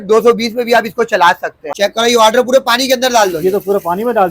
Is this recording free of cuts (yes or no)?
no